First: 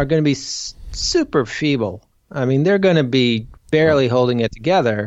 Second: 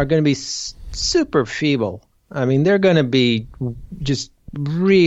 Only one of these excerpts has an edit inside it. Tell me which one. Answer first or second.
first